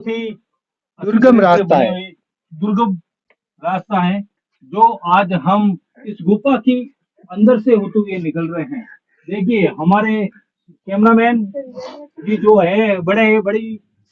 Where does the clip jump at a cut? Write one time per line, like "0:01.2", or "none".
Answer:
none

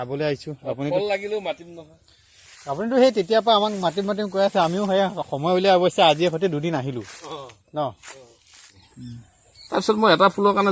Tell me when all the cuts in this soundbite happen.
0:08.9

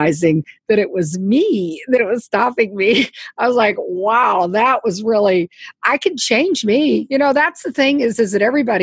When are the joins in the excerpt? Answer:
0:07.0

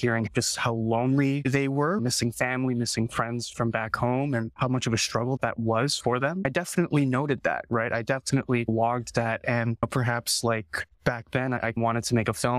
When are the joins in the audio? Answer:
none

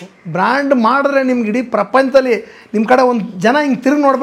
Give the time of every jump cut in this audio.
none

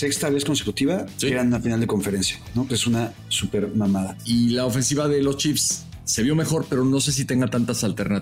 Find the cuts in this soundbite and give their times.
0:01.3
0:04.2

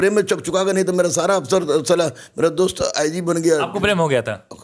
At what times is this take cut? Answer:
none

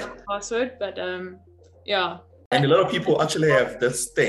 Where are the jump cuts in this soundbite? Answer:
0:02.3

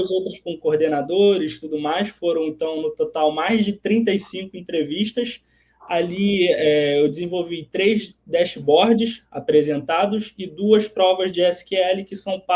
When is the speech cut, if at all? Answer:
none

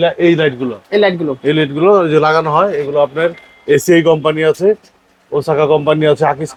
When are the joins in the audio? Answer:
none

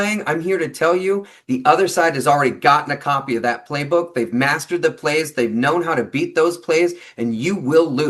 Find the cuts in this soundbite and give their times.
none

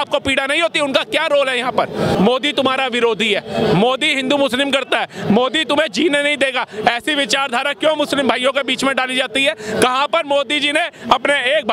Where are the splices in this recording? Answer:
0:02.1

